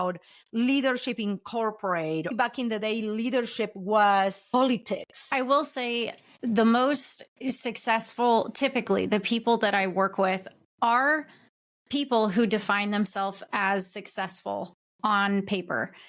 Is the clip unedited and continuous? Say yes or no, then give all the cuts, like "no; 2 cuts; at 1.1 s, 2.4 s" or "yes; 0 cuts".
no; 2 cuts; at 2.3 s, 5.2 s